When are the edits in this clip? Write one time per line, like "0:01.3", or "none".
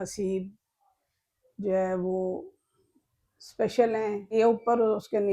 0:04.3